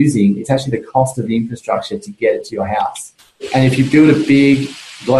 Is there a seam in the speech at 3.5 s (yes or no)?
yes